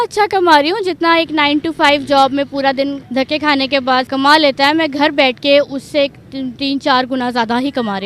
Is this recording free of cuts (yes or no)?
no